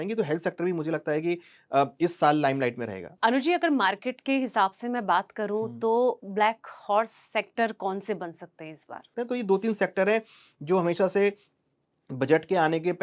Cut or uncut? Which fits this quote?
cut